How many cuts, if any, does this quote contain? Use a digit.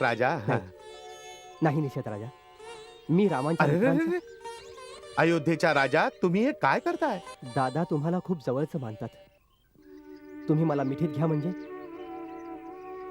1